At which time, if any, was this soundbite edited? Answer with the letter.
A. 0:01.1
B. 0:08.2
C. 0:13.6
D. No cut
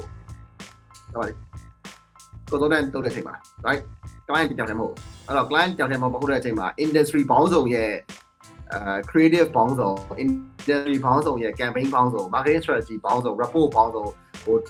D